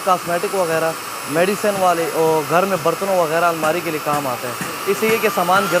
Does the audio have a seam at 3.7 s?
no; 0 cuts

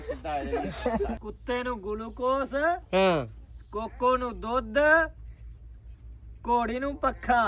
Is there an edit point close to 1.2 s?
yes; 1 cut; at 1.2 s

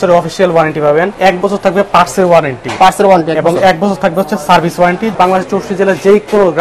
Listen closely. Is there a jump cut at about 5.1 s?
yes; 2 cuts; at 1.1 s, 5.1 s

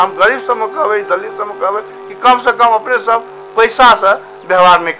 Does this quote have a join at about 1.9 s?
no; 0 cuts

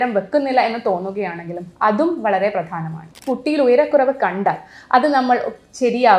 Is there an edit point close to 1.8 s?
no; 1 cut; at 3.2 s

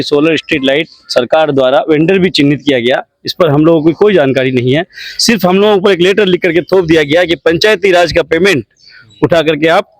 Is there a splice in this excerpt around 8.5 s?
no; 0 cuts

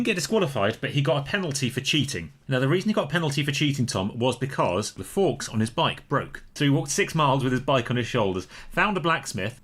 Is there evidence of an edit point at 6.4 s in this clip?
yes; 2 cuts; at 5.0 s, 6.4 s

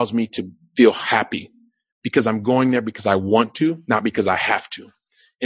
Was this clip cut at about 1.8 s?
no; 0 cuts

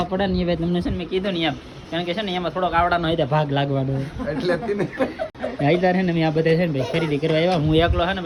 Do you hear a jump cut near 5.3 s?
no; 0 cuts

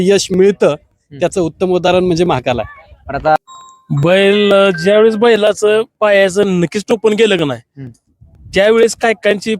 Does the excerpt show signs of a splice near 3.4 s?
yes; 1 cut; at 3.4 s

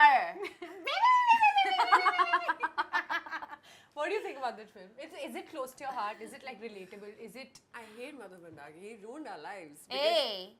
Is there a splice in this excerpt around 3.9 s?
no; 0 cuts

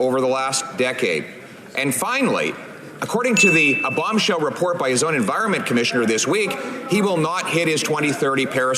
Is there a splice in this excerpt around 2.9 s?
yes; 1 cut; at 2.9 s

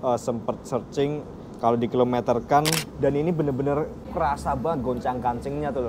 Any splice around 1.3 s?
no; 2 cuts; at 2.9 s, 4.1 s

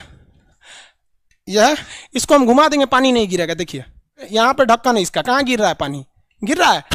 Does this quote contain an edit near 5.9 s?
no; 2 cuts; at 1.9 s, 4.2 s

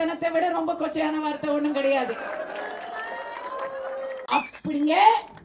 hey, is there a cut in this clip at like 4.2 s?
yes; 1 cut; at 4.2 s

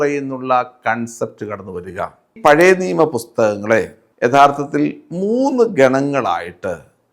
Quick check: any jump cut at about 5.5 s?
no; 2 cuts; at 2.3 s, 4.0 s

